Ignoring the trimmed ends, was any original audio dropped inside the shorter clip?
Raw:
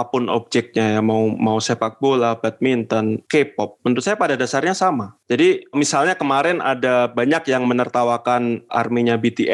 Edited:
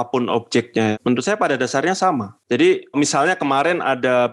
yes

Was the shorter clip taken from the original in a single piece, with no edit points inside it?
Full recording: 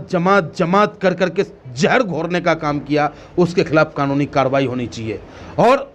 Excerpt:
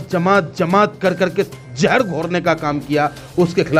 yes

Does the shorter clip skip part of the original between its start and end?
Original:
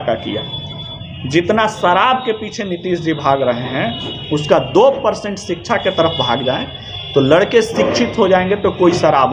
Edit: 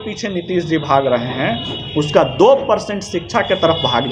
no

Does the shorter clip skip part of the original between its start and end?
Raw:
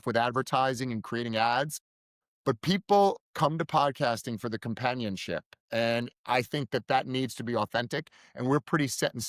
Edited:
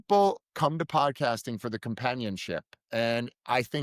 no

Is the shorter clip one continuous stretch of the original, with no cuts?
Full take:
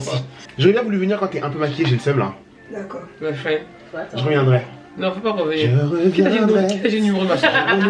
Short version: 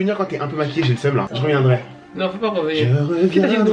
no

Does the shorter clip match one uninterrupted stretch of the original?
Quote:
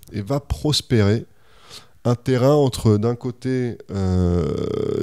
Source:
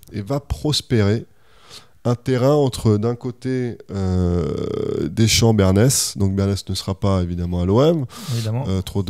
yes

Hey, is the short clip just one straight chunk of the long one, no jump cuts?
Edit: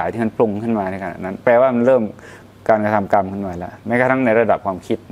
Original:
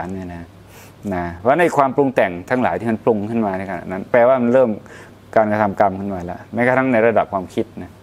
yes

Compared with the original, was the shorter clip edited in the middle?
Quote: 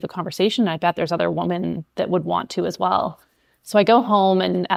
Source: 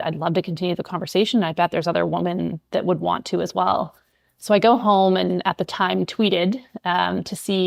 no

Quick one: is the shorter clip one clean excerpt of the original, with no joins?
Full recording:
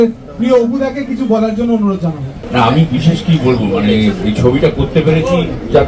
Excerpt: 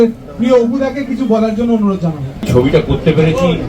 no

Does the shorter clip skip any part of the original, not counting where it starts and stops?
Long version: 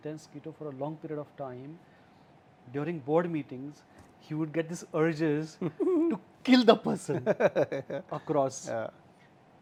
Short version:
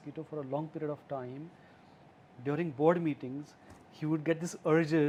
no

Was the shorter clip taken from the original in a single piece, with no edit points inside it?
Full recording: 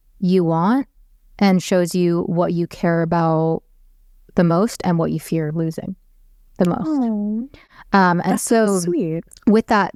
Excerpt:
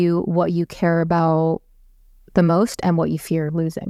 yes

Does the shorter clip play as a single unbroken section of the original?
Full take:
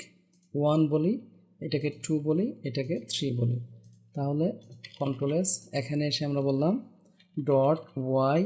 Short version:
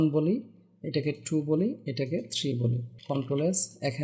no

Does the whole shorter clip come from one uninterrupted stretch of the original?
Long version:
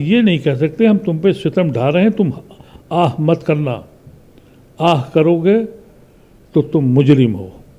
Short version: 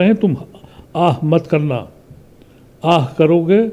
yes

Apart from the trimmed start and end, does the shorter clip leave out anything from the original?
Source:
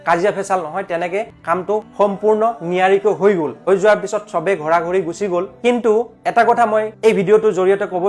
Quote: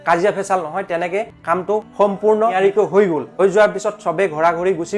yes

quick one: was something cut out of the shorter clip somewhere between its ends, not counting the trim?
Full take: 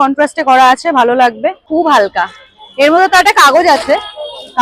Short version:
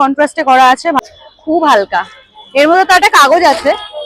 yes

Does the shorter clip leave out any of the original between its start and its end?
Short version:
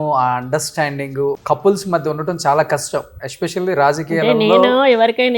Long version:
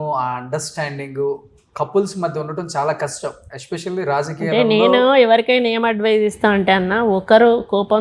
yes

